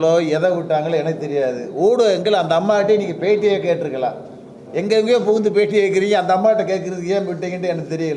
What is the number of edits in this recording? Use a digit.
0